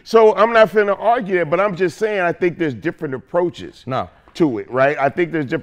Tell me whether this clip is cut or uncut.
uncut